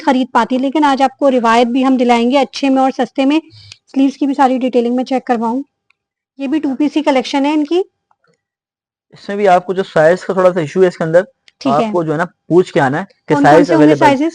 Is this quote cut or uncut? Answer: uncut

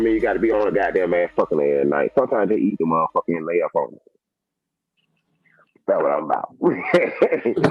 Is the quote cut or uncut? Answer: uncut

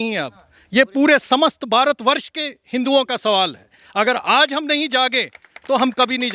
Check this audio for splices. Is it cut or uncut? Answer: uncut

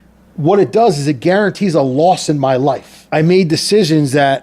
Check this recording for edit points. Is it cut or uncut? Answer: cut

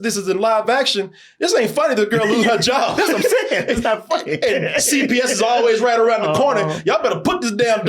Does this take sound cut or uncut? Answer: uncut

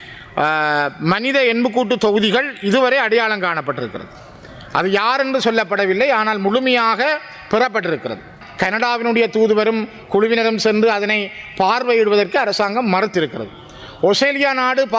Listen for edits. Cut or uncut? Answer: cut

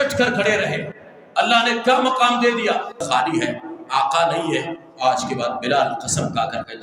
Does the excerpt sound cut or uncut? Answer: cut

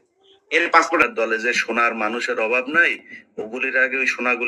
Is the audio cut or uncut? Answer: cut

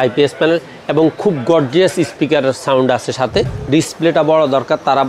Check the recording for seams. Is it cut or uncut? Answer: cut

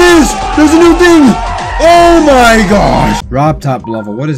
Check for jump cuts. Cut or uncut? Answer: cut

